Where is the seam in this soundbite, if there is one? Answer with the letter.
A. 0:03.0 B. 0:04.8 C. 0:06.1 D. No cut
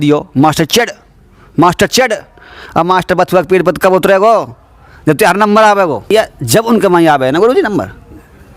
C